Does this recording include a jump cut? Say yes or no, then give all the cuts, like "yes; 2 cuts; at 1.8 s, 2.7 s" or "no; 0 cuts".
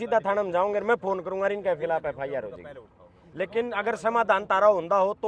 no; 0 cuts